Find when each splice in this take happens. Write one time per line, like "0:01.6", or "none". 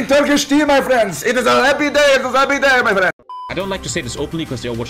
0:03.5